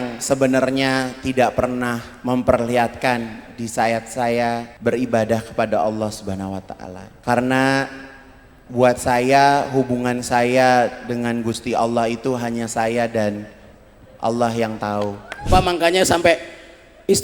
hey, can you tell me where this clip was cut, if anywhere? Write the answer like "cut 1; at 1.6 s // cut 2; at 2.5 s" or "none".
cut 1; at 4.7 s // cut 2; at 15.5 s